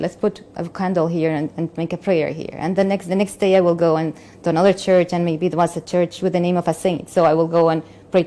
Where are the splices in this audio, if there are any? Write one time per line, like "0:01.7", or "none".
none